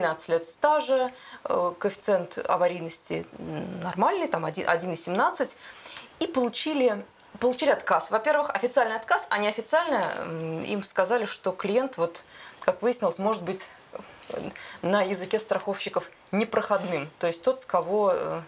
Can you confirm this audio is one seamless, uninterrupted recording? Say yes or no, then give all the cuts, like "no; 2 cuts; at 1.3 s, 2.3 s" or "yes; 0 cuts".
yes; 0 cuts